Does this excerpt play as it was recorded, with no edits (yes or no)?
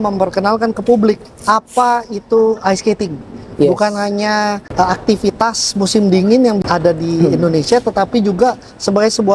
yes